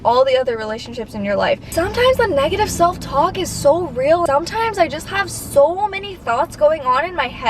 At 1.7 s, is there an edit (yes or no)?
yes